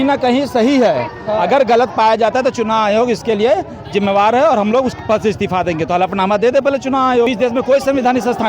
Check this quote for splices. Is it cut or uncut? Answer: cut